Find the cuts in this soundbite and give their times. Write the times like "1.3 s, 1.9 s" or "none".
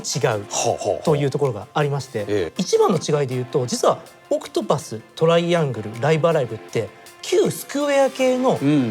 2.5 s